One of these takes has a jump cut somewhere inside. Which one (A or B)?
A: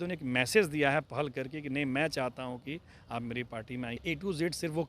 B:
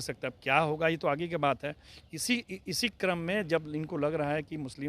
A